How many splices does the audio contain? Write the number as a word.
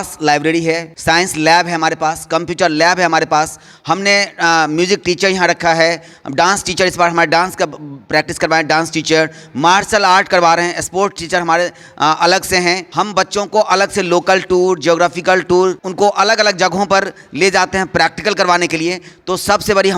three